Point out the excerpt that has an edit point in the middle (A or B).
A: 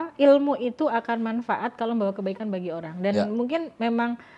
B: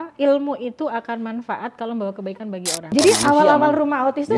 B